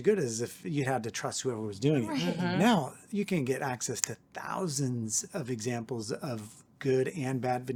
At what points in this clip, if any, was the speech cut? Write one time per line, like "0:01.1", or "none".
none